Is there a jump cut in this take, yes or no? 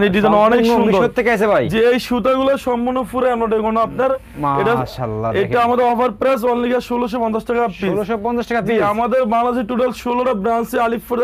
no